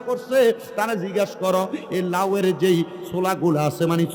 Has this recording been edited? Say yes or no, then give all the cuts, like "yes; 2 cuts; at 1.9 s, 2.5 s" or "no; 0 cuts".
no; 0 cuts